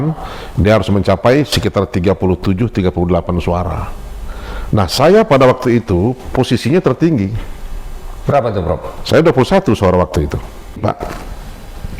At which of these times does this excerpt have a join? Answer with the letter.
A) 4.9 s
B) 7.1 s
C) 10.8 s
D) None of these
C